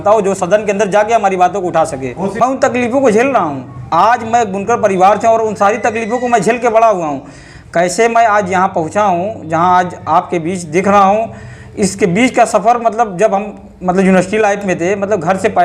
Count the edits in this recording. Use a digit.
1